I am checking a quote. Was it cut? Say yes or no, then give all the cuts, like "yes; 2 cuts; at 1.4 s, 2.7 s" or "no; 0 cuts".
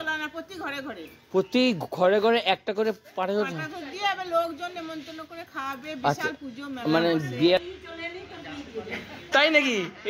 yes; 1 cut; at 7.7 s